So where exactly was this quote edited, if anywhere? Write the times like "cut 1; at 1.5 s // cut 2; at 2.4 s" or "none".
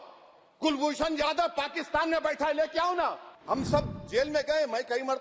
cut 1; at 3.3 s